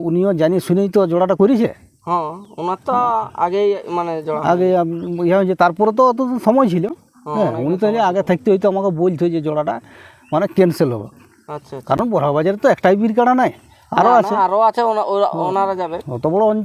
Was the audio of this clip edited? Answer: no; 0 cuts

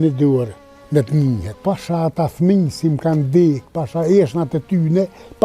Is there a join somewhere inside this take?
yes; 1 cut; at 1.5 s

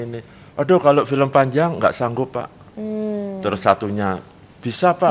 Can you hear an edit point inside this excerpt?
no; 0 cuts

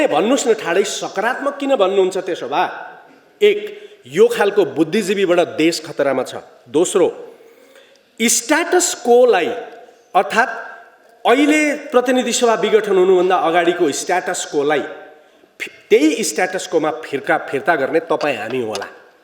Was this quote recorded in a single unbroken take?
yes; 0 cuts

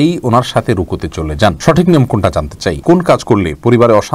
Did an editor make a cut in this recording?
yes; 1 cut; at 2.8 s

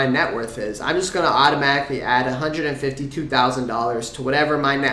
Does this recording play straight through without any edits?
yes; 0 cuts

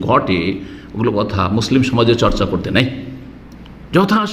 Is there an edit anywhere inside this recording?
no; 0 cuts

